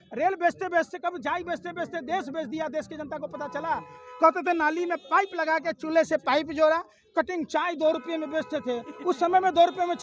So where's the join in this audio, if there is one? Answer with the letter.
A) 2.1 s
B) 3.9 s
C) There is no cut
B